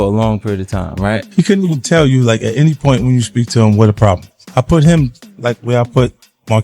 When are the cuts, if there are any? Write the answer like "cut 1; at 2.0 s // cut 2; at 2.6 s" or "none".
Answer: none